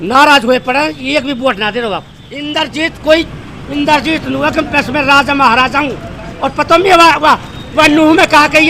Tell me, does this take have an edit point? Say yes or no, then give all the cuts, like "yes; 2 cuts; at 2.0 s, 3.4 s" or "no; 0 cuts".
yes; 1 cut; at 2.2 s